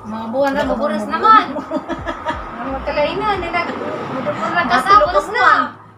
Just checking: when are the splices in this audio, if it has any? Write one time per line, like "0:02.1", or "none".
none

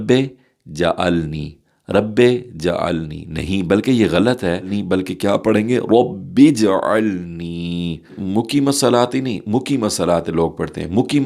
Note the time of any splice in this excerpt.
0:04.8
0:08.2

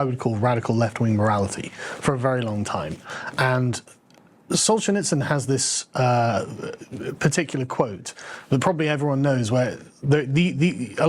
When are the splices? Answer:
0:02.2

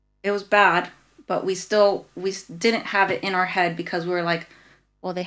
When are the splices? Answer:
none

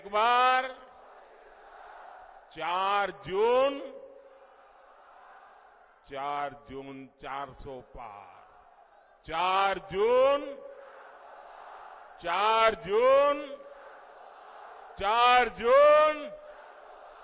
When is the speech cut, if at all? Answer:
none

